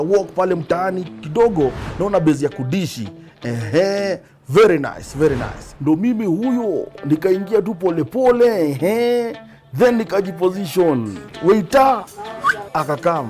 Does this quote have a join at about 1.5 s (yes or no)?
yes